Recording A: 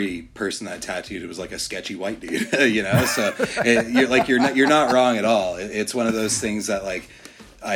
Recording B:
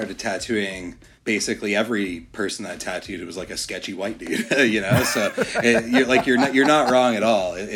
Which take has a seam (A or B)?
B